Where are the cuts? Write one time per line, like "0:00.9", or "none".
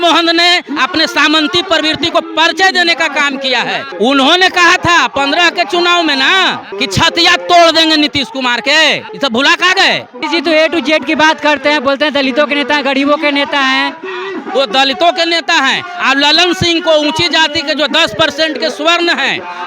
0:03.9
0:06.7
0:09.1
0:10.2